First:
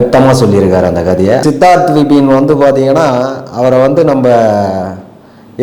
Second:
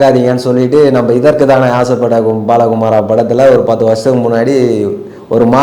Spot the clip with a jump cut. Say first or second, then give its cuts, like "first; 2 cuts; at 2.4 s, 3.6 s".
first; 1 cut; at 1.4 s